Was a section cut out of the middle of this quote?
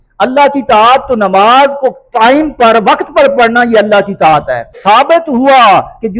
yes; 1 cut; at 4.7 s

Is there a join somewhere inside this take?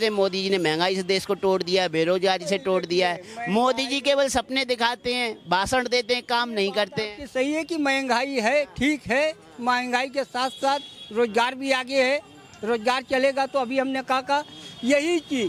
no; 0 cuts

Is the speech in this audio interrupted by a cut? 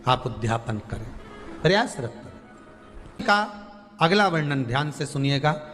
yes; 1 cut; at 3.2 s

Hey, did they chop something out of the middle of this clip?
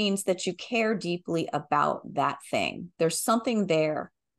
no; 0 cuts

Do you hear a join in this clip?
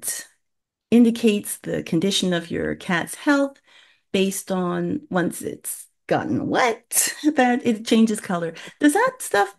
no; 0 cuts

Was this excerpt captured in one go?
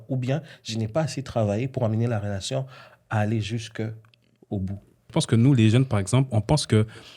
no; 1 cut; at 5.0 s

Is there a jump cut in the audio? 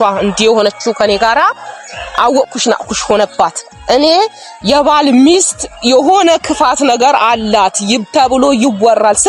no; 0 cuts

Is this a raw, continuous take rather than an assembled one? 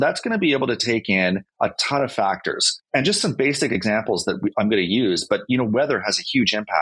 no; 2 cuts; at 1.5 s, 2.7 s

